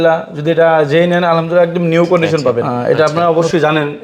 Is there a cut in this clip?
yes; 1 cut; at 2.7 s

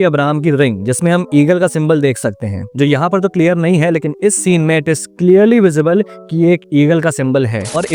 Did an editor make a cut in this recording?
no; 0 cuts

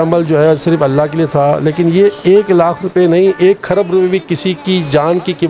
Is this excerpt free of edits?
yes; 0 cuts

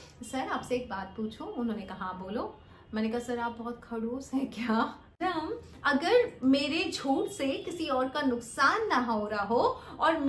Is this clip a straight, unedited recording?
no; 1 cut; at 5.2 s

